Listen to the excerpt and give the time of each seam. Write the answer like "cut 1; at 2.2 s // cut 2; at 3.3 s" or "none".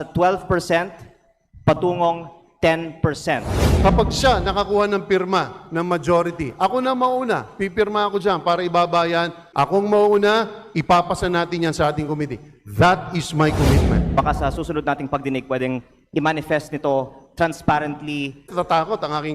cut 1; at 3.6 s // cut 2; at 9.4 s // cut 3; at 14.1 s // cut 4; at 18.5 s